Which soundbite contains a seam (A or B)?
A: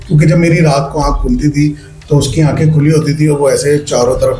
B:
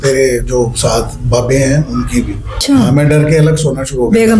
B